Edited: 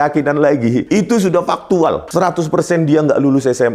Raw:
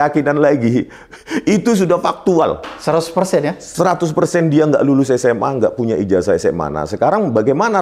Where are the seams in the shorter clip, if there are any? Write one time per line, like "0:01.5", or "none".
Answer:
0:00.8
0:02.0